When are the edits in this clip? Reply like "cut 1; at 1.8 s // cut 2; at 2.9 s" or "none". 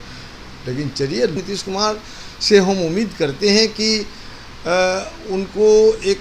cut 1; at 1.4 s

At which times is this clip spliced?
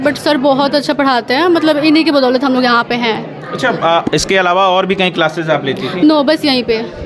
none

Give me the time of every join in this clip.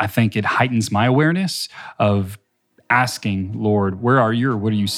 cut 1; at 4.0 s

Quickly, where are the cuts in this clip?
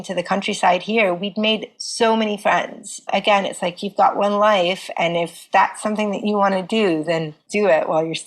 cut 1; at 3.1 s // cut 2; at 5.4 s // cut 3; at 7.4 s

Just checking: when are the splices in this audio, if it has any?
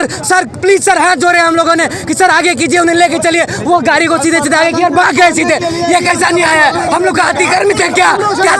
none

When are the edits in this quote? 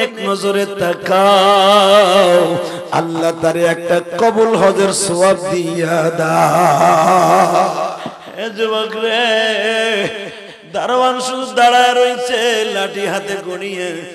cut 1; at 8.2 s

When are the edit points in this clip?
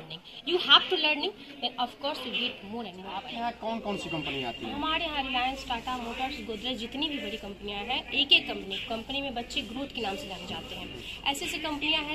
cut 1; at 3.3 s

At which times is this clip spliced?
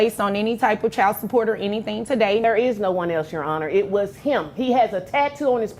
cut 1; at 2.4 s

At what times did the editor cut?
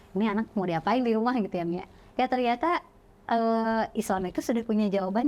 none

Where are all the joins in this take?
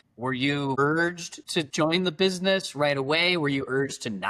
cut 1; at 1.5 s

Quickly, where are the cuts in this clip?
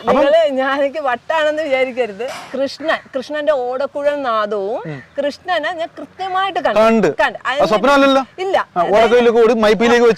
cut 1; at 2.4 s

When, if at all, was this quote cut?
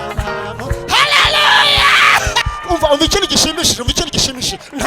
cut 1; at 2.5 s

